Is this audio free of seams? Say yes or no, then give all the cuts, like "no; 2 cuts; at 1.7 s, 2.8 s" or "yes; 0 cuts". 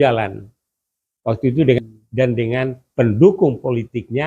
no; 1 cut; at 1.9 s